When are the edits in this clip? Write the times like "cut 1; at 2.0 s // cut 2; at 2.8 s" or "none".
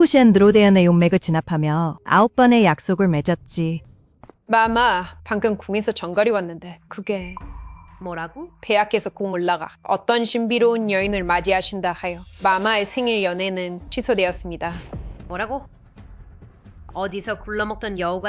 cut 1; at 3.9 s